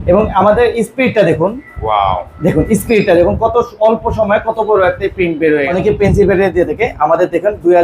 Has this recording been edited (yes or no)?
yes